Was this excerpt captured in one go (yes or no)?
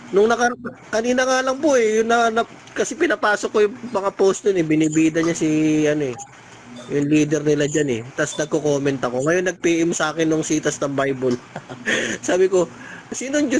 yes